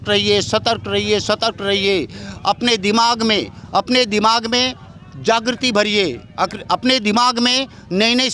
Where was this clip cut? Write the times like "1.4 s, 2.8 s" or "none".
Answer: none